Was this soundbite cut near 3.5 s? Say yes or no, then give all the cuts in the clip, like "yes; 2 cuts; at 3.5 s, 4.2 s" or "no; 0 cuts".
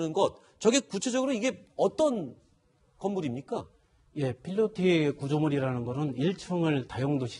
no; 1 cut; at 5.7 s